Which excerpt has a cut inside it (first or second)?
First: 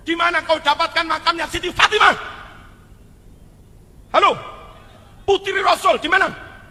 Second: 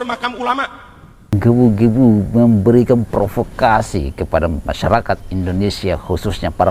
second